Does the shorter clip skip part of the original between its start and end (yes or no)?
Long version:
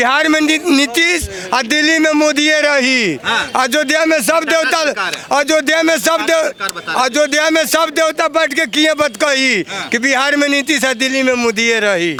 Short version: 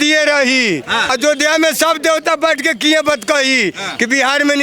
yes